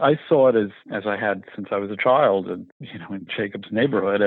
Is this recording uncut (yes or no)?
yes